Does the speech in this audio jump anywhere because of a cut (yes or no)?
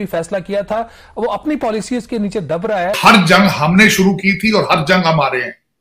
yes